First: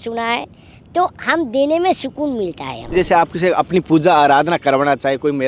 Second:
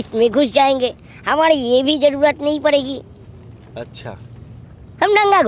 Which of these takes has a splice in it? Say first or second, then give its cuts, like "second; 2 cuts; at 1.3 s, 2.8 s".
first; 1 cut; at 2.9 s